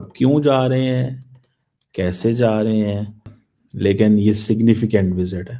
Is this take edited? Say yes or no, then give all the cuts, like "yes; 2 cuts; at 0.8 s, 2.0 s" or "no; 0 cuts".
yes; 1 cut; at 3.3 s